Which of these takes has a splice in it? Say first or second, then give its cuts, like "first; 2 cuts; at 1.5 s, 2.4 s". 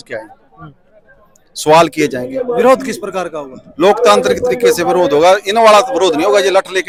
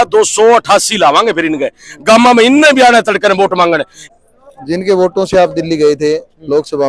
second; 1 cut; at 4.0 s